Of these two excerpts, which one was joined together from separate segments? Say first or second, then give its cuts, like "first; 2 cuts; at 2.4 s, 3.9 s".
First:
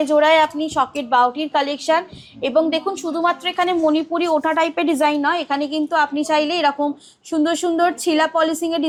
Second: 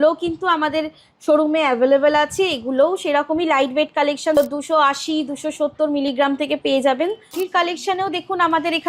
second; 2 cuts; at 4.4 s, 7.3 s